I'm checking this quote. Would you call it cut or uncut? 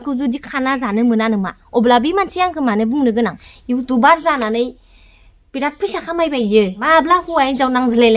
cut